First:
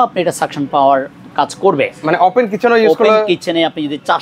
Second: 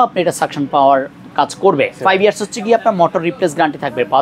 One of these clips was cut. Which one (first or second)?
second